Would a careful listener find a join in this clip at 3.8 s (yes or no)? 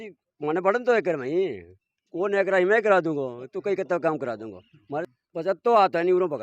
no